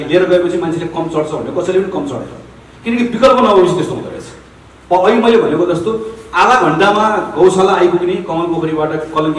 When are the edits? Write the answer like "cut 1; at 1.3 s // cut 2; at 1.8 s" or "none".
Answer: none